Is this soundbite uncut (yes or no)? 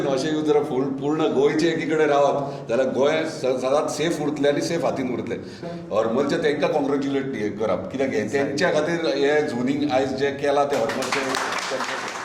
no